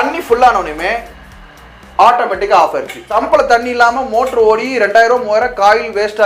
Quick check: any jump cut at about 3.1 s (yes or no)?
yes